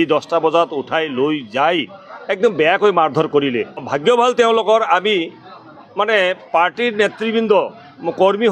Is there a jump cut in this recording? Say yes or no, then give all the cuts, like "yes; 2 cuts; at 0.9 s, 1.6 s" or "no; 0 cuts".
yes; 1 cut; at 3.8 s